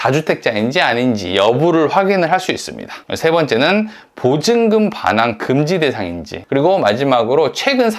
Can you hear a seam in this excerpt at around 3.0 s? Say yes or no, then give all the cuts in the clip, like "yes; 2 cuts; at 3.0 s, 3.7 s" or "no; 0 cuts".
no; 1 cut; at 6.3 s